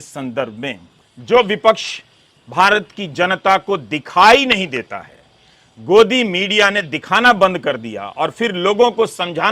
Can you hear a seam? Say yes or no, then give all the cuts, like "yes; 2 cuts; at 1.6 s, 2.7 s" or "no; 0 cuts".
yes; 1 cut; at 1.1 s